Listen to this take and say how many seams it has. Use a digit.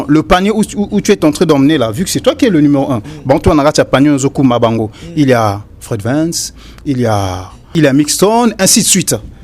1